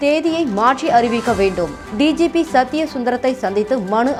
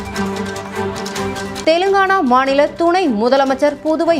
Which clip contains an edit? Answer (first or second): second